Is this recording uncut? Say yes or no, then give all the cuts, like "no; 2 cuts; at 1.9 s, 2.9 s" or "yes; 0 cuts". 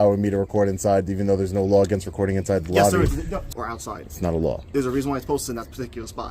no; 2 cuts; at 3.5 s, 4.6 s